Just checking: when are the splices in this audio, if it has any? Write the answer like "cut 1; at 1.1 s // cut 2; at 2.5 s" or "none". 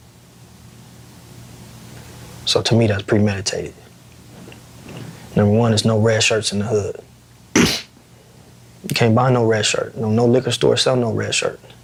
none